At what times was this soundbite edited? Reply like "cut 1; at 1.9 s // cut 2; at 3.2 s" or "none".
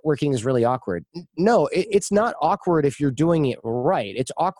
none